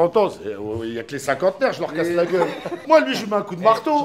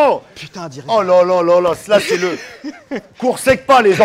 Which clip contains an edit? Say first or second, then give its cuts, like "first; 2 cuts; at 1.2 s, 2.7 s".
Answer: first; 1 cut; at 2.8 s